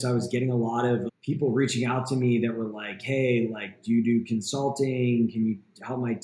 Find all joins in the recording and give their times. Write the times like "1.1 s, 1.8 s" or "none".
1.1 s